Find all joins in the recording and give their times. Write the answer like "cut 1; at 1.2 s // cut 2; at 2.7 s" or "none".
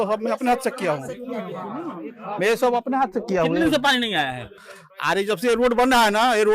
none